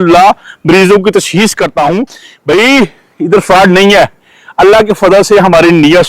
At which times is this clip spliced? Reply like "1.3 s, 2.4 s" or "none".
2.2 s